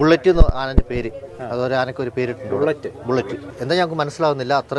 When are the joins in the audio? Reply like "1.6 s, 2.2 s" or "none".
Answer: 3.4 s